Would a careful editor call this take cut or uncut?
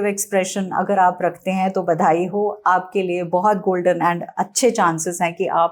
uncut